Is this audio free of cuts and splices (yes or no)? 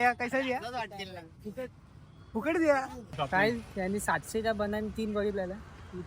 no